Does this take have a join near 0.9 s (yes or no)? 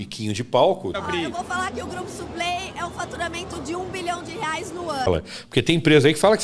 yes